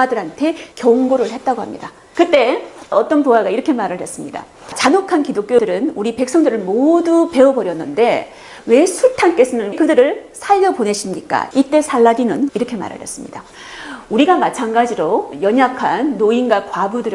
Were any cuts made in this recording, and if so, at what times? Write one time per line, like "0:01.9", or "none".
0:02.1